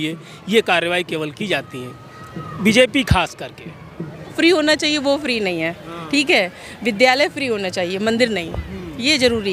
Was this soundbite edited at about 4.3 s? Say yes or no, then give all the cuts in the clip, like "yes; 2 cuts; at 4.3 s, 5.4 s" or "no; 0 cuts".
yes; 1 cut; at 4.3 s